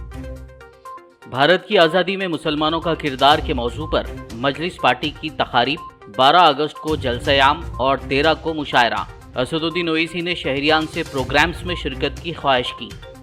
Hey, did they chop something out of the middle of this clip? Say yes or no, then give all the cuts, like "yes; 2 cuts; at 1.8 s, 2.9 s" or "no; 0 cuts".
no; 0 cuts